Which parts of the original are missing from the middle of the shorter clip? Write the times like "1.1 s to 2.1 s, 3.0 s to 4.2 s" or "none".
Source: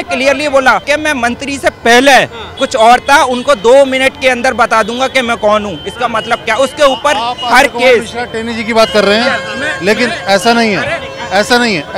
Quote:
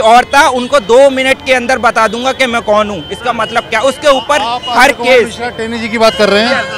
none